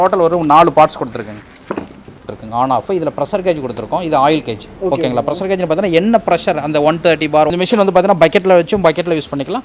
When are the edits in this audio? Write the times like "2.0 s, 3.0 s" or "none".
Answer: 2.3 s, 7.5 s